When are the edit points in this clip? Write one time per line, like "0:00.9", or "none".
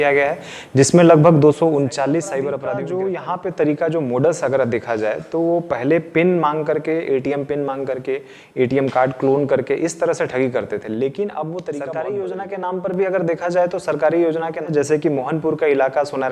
0:02.5
0:11.9
0:14.6